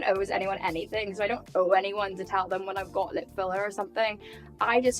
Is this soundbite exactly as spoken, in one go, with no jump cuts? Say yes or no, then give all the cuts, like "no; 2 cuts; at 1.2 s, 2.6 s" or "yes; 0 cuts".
yes; 0 cuts